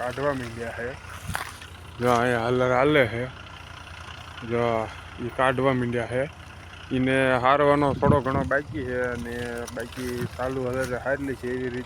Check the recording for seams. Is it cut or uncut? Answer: uncut